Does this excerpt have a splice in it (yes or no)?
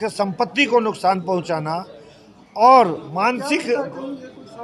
no